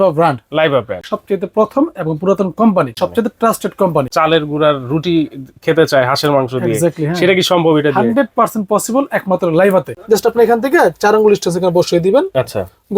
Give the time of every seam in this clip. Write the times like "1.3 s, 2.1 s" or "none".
1.1 s, 2.9 s, 4.1 s, 9.9 s